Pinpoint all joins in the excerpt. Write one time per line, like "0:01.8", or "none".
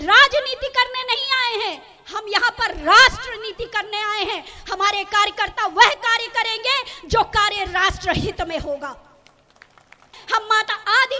0:10.2